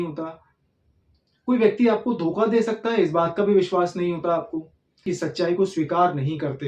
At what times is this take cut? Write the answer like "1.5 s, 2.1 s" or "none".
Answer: 5.1 s